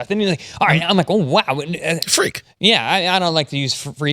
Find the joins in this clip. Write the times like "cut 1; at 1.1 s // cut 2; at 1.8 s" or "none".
cut 1; at 2.0 s